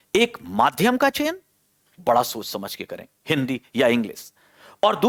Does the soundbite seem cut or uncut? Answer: uncut